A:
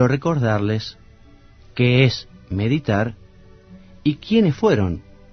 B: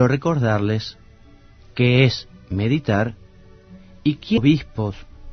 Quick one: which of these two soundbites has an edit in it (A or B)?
A